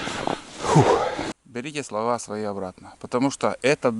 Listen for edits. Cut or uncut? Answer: cut